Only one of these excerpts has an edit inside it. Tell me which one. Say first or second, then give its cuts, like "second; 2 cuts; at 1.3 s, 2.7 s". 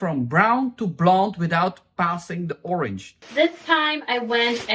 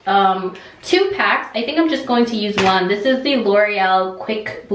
first; 1 cut; at 3.2 s